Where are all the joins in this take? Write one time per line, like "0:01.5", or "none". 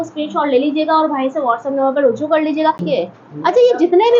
0:02.8